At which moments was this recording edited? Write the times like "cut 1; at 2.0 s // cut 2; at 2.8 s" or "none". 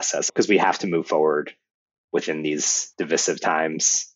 cut 1; at 2.8 s